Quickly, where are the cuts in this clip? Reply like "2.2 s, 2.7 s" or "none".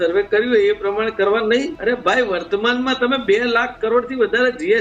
1.7 s